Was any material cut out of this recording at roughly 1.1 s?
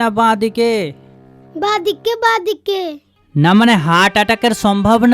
no; 1 cut; at 3.0 s

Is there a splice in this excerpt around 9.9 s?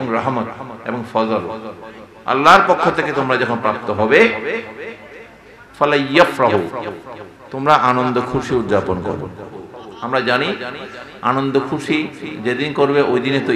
yes; 1 cut; at 9.9 s

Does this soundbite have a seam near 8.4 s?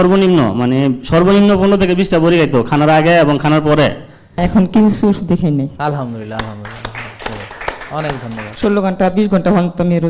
yes; 2 cuts; at 4.4 s, 8.4 s

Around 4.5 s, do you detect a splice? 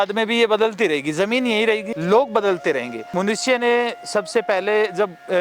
no; 2 cuts; at 1.9 s, 3.1 s

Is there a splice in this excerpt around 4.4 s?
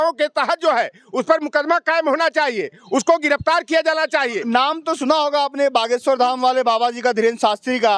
yes; 1 cut; at 4.4 s

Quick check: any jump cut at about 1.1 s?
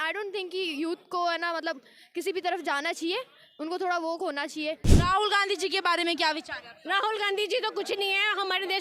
no; 1 cut; at 4.9 s

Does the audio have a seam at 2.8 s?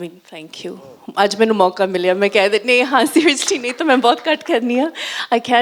no; 0 cuts

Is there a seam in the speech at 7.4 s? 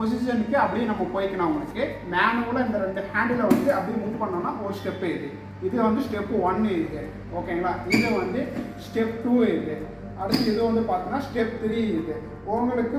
no; 0 cuts

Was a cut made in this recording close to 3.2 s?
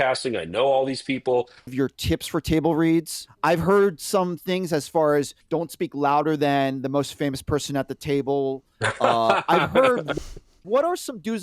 yes; 3 cuts; at 1.7 s, 3.2 s, 10.3 s

